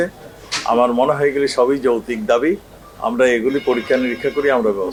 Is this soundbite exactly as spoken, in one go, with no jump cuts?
yes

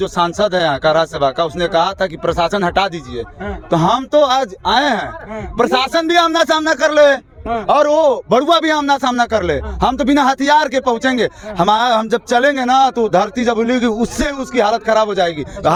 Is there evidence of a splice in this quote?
no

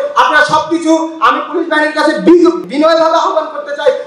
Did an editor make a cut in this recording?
yes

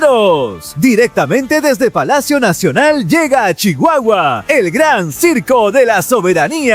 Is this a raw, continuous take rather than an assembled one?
yes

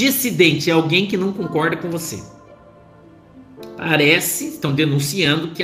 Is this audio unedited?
no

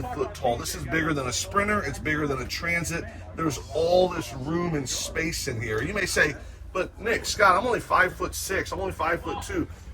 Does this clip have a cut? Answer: no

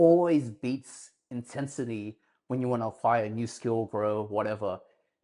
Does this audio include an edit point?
no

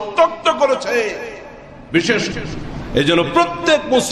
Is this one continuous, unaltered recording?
no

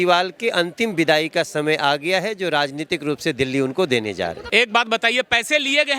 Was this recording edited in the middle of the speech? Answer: yes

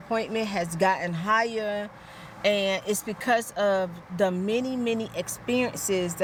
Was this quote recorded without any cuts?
yes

